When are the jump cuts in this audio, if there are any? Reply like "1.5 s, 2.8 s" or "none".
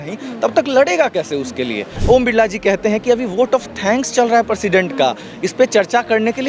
1.9 s